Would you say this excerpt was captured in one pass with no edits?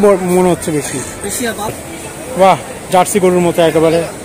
no; 1 cut; at 1.8 s

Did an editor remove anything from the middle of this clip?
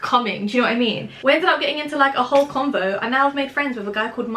yes; 1 cut; at 1.1 s

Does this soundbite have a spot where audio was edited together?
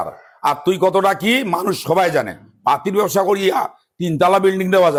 no; 0 cuts

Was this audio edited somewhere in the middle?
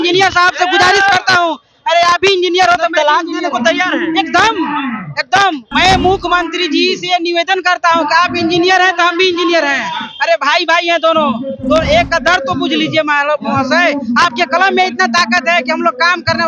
yes; 1 cut; at 5.6 s

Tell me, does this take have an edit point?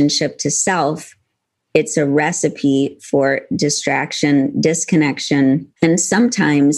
yes; 1 cut; at 5.7 s

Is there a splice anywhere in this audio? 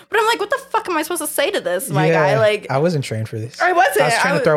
no; 0 cuts

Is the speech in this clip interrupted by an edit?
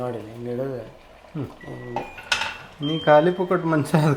no; 0 cuts

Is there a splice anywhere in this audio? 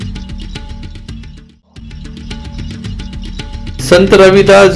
yes; 2 cuts; at 2.0 s, 3.7 s

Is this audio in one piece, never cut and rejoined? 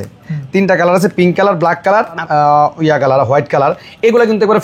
no; 1 cut; at 2.2 s

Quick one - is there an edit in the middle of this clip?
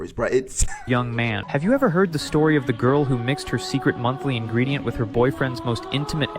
yes; 1 cut; at 1.4 s

